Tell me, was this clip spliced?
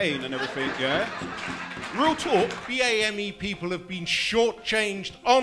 yes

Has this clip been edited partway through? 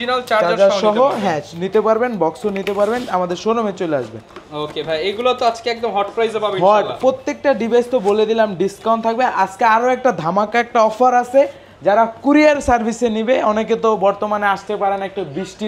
no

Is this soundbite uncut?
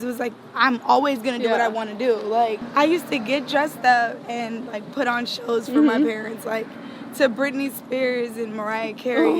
no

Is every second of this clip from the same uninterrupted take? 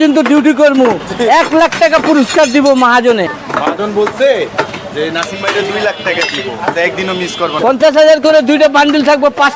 no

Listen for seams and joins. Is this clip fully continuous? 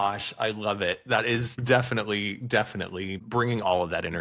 no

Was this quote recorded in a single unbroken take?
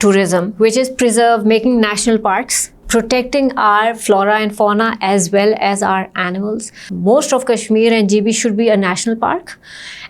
no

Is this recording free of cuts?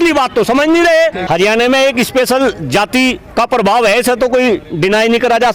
no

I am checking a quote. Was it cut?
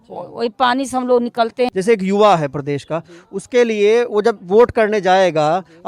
yes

